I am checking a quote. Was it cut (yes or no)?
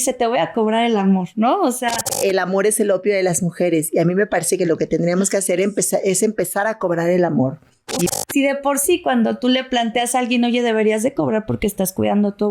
yes